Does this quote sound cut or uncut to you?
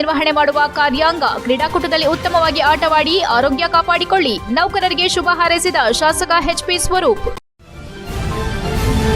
cut